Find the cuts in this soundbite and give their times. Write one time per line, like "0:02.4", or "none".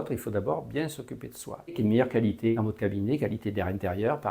0:01.7